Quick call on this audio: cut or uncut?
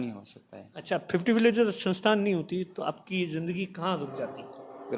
uncut